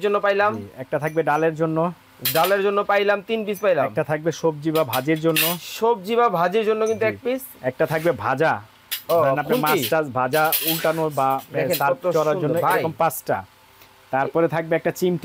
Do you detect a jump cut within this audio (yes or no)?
no